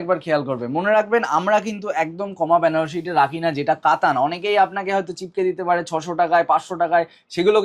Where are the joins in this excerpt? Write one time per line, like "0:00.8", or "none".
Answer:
none